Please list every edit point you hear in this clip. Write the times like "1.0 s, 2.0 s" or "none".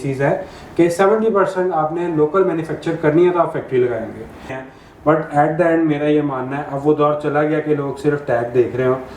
4.5 s